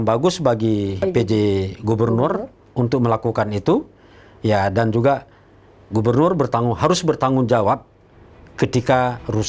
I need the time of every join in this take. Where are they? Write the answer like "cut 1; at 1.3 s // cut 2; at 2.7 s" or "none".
cut 1; at 1.0 s